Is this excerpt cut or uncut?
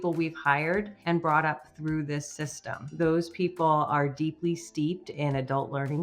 cut